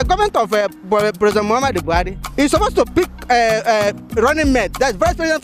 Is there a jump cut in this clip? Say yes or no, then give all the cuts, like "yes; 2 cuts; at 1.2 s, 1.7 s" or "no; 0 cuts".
yes; 2 cuts; at 2.2 s, 2.9 s